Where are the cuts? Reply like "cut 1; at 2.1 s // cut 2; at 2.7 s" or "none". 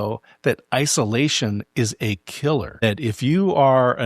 cut 1; at 2.8 s